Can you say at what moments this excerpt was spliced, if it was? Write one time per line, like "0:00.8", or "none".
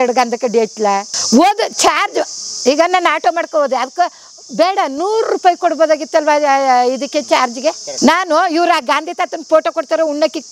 0:01.1
0:07.9